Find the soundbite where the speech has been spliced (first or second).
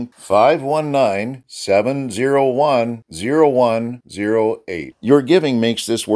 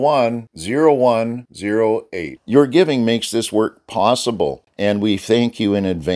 second